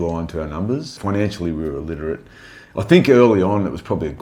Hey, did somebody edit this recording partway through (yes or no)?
yes